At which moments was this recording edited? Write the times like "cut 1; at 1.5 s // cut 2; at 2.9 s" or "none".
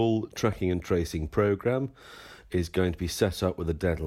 none

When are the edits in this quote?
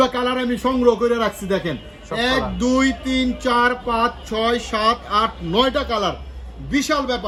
none

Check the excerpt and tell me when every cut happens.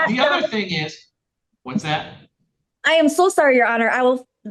none

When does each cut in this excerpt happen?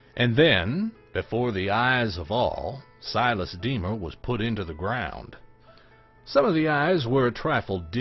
none

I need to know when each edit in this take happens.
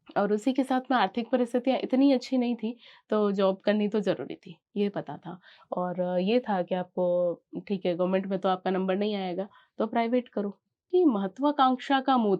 cut 1; at 10.9 s

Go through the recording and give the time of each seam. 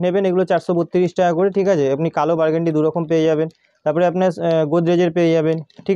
none

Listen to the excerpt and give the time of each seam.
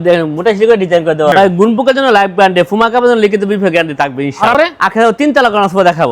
cut 1; at 1.3 s // cut 2; at 4.5 s

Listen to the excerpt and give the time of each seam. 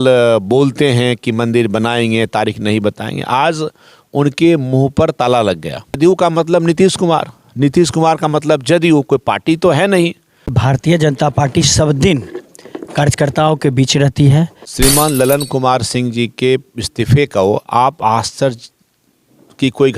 cut 1; at 6.0 s // cut 2; at 10.6 s // cut 3; at 14.6 s

